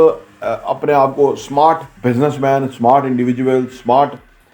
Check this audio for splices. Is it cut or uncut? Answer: cut